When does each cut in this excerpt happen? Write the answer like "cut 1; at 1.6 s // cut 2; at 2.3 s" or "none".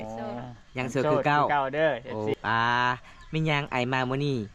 cut 1; at 2.4 s

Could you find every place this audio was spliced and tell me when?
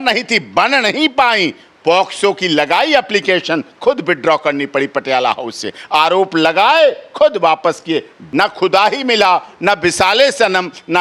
cut 1; at 8.2 s

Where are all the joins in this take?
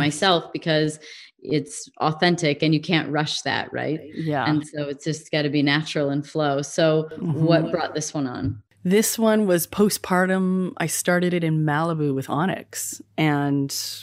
none

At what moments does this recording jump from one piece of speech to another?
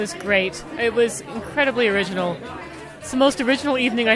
none

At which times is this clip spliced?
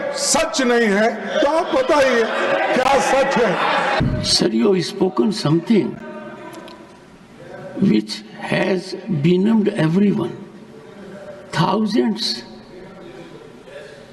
cut 1; at 4.0 s

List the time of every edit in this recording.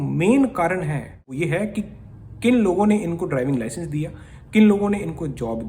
cut 1; at 1.3 s

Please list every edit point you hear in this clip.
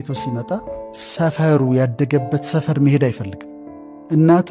cut 1; at 1.0 s

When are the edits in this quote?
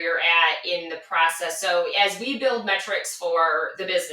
cut 1; at 1.9 s

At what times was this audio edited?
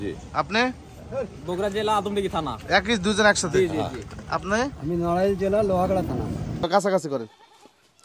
cut 1; at 6.6 s

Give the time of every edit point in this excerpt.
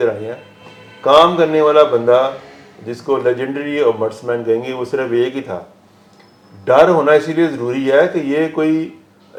none

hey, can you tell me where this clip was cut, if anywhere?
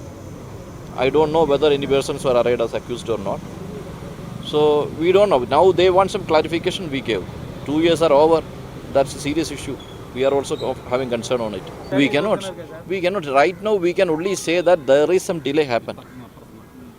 cut 1; at 11.9 s

